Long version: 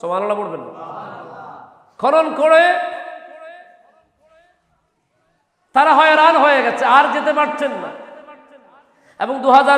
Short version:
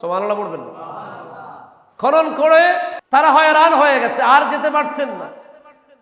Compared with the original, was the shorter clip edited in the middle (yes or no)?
yes